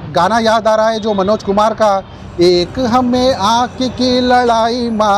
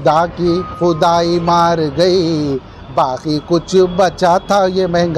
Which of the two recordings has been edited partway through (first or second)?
first